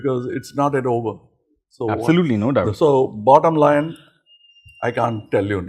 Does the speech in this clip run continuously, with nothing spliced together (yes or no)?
yes